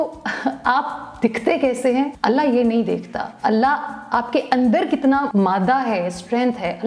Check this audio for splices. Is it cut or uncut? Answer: cut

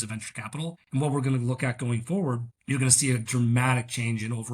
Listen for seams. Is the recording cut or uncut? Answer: cut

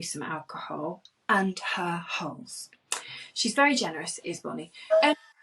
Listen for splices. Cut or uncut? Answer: uncut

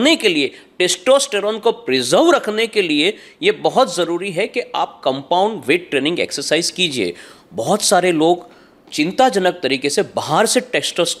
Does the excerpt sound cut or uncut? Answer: uncut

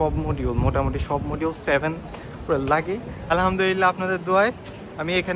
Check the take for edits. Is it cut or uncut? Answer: cut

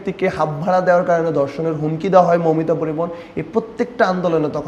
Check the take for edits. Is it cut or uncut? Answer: uncut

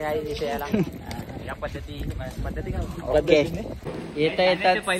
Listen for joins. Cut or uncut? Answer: cut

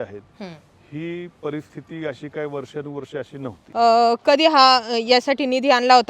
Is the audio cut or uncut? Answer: cut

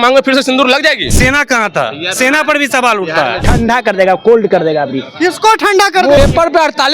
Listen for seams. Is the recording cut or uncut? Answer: cut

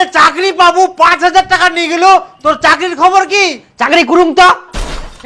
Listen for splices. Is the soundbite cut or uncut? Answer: uncut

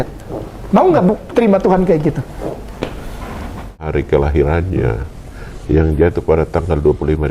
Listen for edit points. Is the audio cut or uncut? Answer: cut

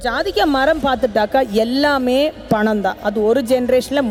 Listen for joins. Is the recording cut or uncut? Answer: uncut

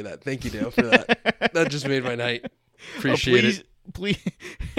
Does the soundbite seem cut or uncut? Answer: uncut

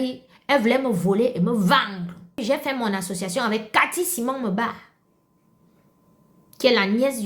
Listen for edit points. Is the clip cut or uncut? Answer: cut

